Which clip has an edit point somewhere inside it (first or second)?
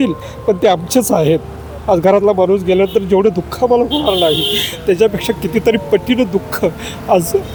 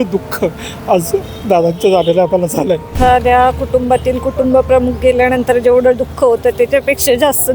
second